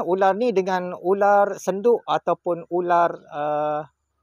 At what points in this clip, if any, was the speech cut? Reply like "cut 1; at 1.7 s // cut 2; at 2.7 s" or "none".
none